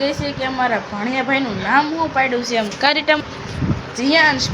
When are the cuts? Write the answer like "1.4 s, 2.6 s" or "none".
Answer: 3.2 s